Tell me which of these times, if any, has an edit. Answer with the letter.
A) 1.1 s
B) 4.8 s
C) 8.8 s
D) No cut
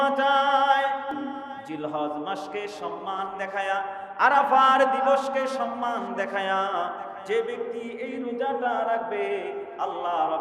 A